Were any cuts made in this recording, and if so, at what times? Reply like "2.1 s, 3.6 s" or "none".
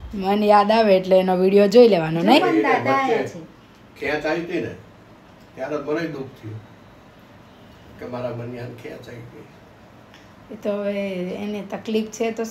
none